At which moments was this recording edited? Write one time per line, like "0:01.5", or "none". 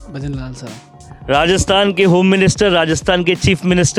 none